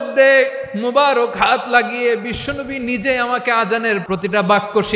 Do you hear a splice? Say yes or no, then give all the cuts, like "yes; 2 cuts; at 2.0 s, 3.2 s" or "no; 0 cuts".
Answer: yes; 1 cut; at 4.0 s